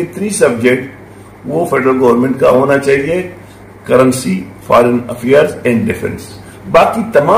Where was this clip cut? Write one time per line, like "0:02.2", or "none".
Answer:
none